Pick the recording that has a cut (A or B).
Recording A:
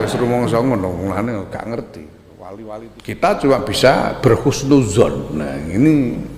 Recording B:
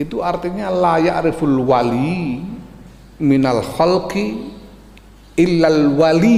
A